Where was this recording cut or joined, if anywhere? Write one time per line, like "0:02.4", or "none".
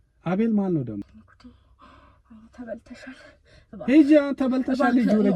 0:01.0